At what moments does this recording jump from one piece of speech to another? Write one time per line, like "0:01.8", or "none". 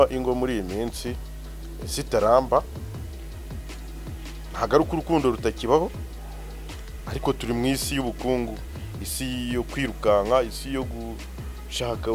none